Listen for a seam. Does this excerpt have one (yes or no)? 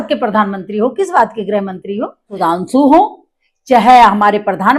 yes